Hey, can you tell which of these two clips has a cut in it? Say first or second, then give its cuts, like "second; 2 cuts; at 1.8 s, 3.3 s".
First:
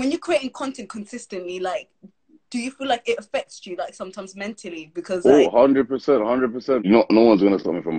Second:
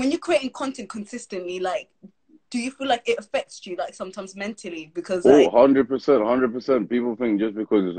first; 1 cut; at 6.8 s